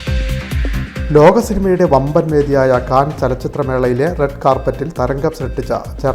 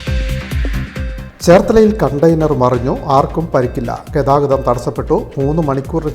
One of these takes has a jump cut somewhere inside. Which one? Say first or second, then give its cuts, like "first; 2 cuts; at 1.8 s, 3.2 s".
second; 1 cut; at 1.0 s